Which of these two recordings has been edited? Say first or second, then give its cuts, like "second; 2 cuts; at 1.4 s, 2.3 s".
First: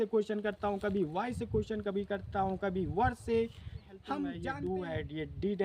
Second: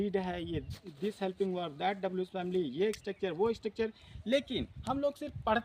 first; 1 cut; at 4.4 s